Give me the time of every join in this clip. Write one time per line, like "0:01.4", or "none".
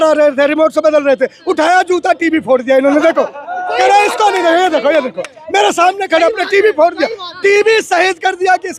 none

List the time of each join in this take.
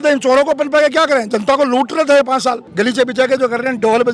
0:02.7

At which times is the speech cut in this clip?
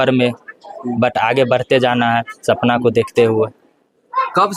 none

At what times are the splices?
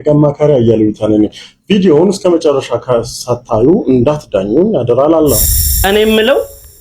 0:05.5

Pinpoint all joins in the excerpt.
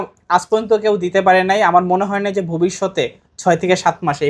none

